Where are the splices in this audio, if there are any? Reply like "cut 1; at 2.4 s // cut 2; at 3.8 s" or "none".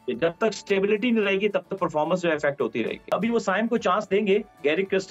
cut 1; at 3.1 s

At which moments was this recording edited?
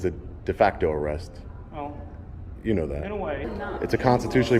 cut 1; at 3.5 s

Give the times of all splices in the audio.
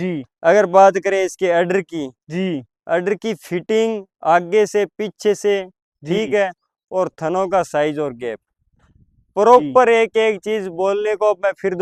none

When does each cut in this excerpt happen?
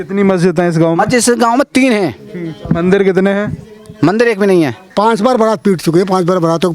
cut 1; at 4.9 s

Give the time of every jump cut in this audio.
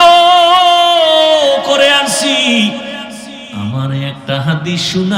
cut 1; at 3.4 s

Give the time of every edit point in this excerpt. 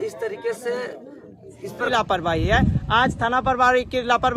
cut 1; at 1.9 s

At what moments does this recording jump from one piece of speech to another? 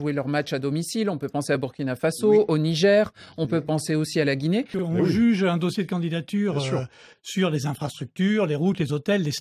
cut 1; at 4.7 s

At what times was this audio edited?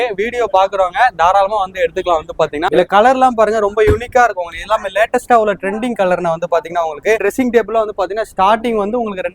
cut 1; at 2.7 s // cut 2; at 7.2 s

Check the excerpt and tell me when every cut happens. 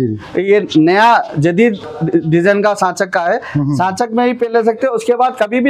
none

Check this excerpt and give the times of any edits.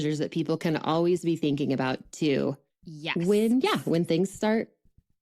none

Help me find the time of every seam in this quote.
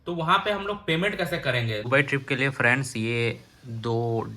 cut 1; at 1.9 s

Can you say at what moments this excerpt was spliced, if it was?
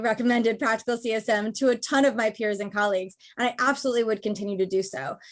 none

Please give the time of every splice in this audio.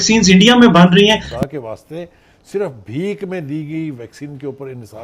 cut 1; at 1.2 s

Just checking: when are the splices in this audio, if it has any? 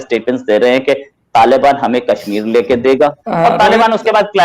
cut 1; at 3.2 s

